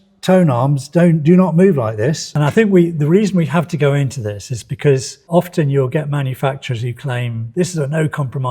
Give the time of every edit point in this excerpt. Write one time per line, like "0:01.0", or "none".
0:02.3